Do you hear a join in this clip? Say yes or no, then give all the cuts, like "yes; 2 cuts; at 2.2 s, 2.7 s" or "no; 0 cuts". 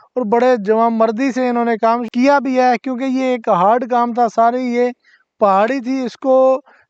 no; 0 cuts